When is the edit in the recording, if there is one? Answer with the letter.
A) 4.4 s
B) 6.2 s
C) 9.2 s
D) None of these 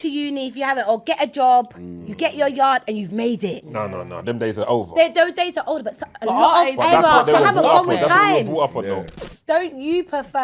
C